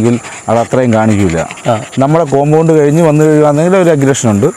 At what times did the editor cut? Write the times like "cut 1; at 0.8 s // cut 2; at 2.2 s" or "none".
none